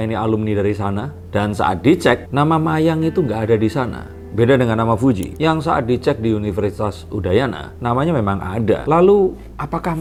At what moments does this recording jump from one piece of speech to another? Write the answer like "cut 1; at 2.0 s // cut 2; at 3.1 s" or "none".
none